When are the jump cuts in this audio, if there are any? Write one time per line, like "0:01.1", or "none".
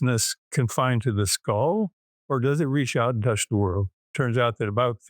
0:04.1